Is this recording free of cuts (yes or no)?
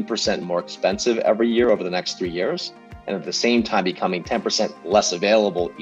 no